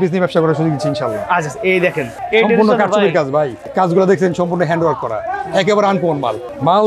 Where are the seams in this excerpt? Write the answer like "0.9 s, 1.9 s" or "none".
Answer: none